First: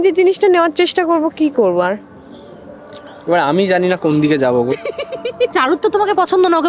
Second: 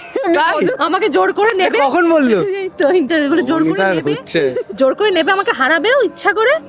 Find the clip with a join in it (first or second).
first